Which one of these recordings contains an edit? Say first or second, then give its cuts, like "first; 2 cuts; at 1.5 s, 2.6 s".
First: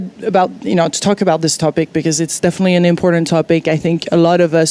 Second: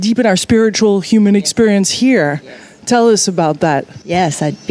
first; 1 cut; at 2.6 s